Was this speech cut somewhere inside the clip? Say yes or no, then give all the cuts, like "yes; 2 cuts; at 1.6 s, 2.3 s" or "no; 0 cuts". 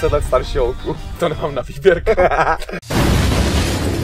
yes; 1 cut; at 2.7 s